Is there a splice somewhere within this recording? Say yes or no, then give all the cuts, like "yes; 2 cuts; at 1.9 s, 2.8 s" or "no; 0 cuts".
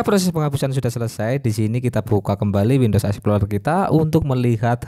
no; 0 cuts